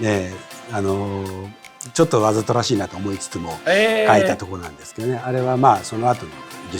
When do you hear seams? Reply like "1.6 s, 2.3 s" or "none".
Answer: none